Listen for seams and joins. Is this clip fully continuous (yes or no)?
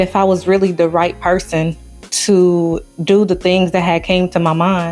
yes